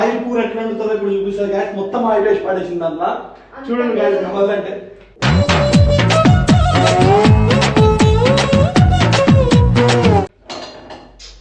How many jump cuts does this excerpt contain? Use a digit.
0